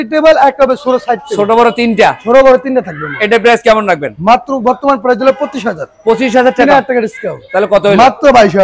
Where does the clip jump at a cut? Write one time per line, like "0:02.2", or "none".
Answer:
none

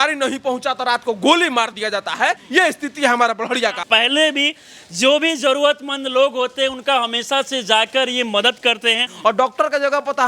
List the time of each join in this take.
0:02.4
0:03.8
0:09.1

